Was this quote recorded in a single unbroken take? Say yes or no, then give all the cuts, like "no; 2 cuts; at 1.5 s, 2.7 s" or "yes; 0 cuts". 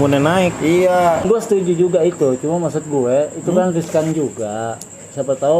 no; 1 cut; at 1.2 s